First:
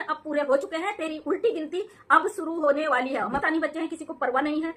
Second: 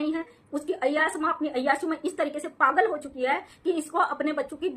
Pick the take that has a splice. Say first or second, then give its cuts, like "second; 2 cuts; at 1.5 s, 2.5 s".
first; 1 cut; at 3.4 s